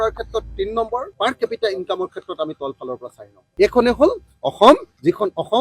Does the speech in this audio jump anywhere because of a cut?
yes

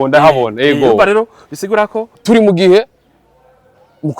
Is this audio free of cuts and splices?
no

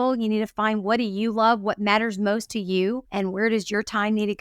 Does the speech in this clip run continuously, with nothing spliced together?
no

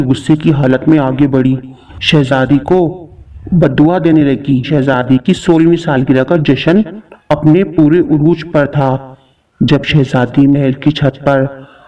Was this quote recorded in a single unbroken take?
no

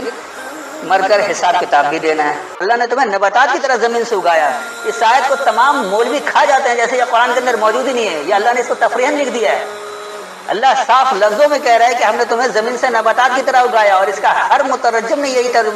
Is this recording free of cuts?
no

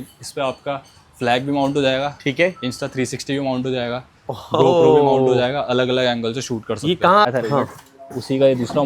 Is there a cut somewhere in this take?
yes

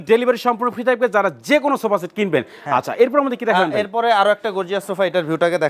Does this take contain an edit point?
no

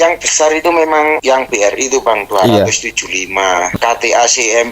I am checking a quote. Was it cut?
yes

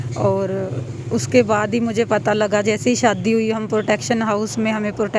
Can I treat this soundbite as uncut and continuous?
yes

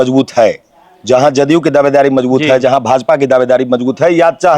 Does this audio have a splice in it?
no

